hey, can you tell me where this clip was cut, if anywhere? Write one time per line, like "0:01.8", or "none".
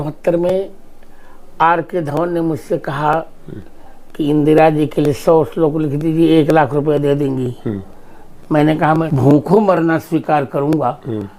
0:09.1

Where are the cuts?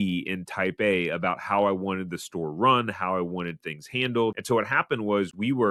none

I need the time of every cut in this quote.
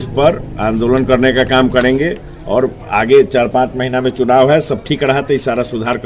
none

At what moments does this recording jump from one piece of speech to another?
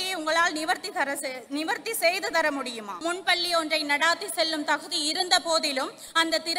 0:02.9

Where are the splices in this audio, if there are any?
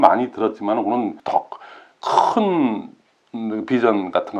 0:01.2

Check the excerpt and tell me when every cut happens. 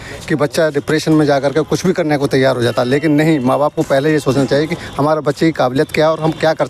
none

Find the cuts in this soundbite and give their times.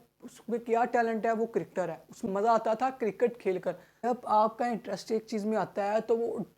0:02.3
0:04.0

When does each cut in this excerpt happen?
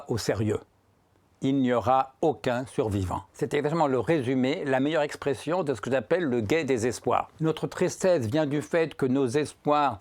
0:03.2
0:07.3

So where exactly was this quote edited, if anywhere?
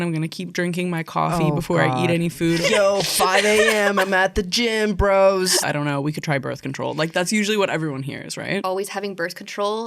0:02.6
0:05.6
0:08.6

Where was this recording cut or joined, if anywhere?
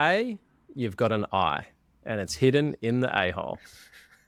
none

